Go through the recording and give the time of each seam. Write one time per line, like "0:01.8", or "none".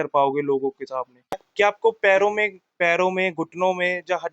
0:01.4